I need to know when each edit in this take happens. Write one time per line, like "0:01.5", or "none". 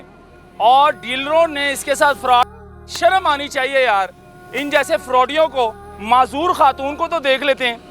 0:05.9